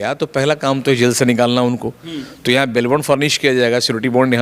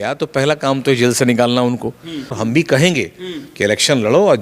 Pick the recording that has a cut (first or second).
second